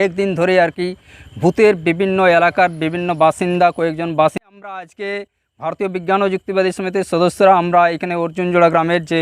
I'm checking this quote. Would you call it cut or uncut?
cut